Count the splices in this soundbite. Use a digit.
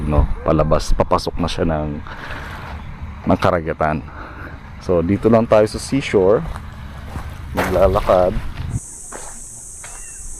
1